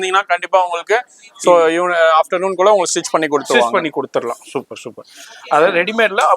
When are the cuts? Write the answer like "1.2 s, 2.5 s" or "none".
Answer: none

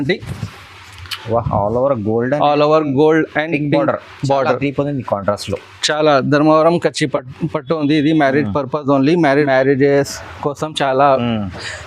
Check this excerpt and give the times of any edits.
9.5 s

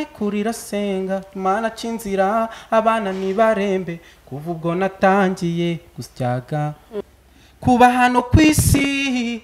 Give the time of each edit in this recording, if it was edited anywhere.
7.0 s

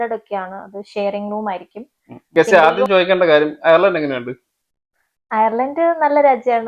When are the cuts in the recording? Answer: 2.3 s

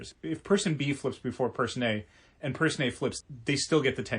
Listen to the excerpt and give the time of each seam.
3.2 s

